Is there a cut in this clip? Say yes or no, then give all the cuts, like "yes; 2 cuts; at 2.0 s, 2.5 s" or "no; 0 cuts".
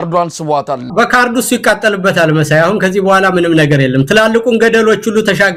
no; 0 cuts